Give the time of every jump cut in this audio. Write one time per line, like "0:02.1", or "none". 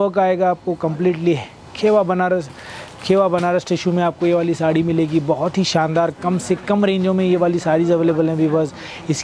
none